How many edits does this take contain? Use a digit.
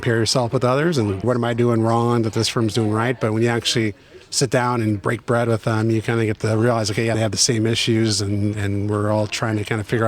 2